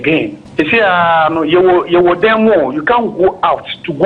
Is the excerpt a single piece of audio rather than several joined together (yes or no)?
yes